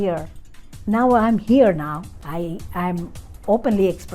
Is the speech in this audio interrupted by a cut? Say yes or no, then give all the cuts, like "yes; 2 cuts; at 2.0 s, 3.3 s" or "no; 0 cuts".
yes; 1 cut; at 2.1 s